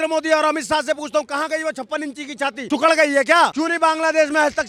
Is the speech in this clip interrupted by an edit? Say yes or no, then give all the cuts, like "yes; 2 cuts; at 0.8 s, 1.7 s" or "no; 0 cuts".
no; 0 cuts